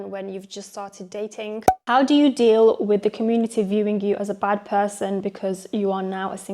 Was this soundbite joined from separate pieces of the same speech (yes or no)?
yes